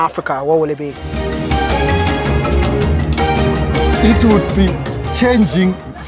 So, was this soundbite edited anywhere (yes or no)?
no